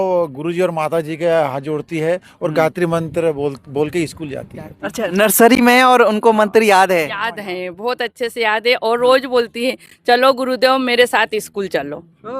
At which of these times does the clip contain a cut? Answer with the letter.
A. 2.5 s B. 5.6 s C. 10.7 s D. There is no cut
D